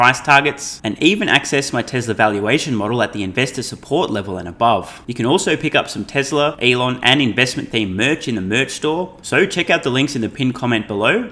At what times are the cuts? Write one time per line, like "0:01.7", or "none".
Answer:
0:05.0
0:06.6
0:09.2